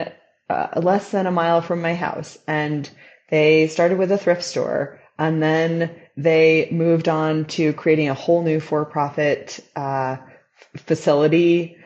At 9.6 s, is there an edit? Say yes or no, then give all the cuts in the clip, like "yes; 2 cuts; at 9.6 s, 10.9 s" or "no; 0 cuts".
no; 0 cuts